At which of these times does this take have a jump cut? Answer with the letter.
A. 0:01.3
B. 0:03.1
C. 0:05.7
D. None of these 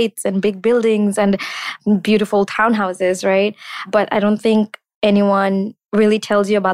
C